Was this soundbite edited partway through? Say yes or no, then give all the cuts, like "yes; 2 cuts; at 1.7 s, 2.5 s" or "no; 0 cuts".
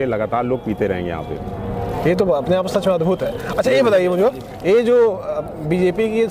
no; 0 cuts